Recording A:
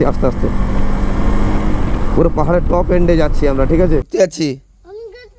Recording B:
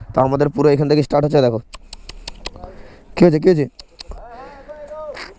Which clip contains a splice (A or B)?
A